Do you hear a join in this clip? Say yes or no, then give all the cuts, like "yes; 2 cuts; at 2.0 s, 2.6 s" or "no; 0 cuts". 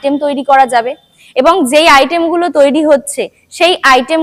no; 0 cuts